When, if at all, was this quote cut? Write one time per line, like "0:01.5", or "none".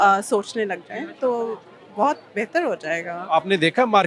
none